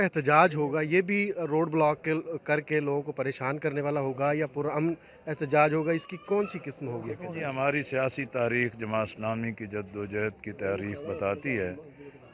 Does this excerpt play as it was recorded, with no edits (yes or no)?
yes